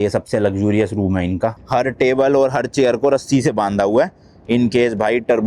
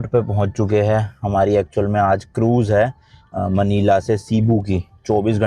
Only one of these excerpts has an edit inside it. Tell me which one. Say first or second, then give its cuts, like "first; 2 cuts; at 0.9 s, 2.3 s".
first; 1 cut; at 1.6 s